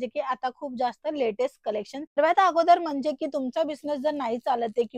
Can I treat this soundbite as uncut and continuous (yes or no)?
no